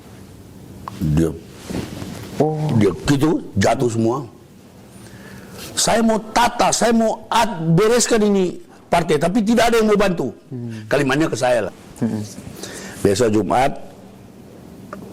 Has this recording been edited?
yes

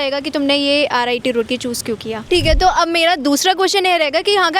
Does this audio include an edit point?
yes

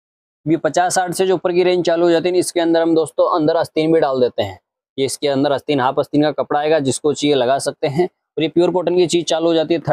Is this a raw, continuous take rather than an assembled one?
yes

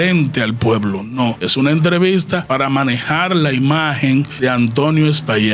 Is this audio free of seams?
no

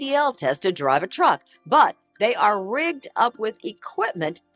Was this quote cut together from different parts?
no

